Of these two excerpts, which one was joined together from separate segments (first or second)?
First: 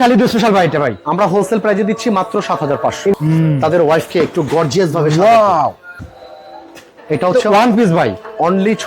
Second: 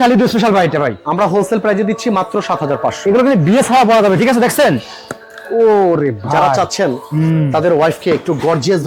first